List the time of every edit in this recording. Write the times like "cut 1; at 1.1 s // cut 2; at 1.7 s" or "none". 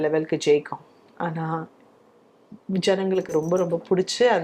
none